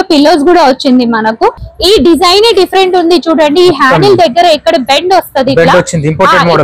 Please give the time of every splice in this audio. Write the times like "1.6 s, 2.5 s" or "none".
1.6 s